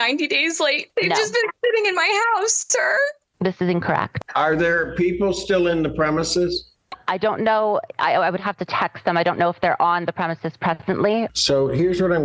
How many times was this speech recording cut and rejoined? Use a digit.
3